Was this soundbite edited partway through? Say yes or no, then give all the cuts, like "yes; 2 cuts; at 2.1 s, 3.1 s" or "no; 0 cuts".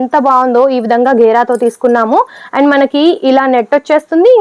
no; 0 cuts